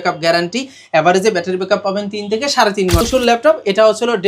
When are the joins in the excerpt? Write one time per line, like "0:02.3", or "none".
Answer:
0:03.0